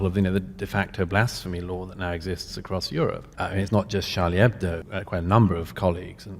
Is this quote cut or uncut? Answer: cut